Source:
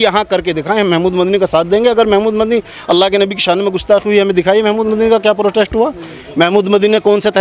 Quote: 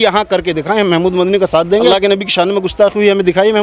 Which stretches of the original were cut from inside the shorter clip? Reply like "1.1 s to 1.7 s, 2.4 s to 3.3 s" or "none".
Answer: 1.9 s to 3.0 s